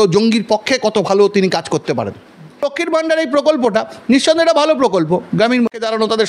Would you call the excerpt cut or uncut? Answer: cut